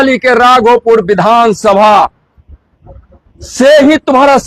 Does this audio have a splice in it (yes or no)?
no